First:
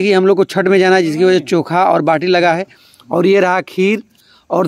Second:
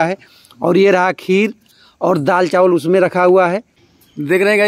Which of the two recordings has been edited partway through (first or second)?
second